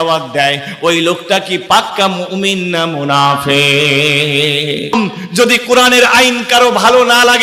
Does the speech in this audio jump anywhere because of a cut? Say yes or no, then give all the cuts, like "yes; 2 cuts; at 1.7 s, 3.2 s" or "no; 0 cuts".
yes; 1 cut; at 4.9 s